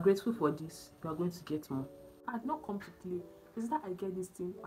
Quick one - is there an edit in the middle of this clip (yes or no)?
yes